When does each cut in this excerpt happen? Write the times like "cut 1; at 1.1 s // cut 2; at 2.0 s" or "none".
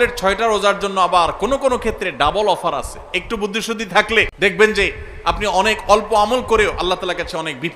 cut 1; at 4.3 s